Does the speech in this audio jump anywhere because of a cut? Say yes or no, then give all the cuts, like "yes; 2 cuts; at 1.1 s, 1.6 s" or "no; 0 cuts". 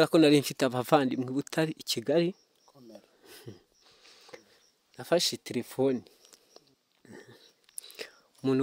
yes; 1 cut; at 6.8 s